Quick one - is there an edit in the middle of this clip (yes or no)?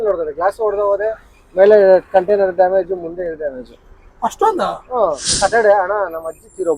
yes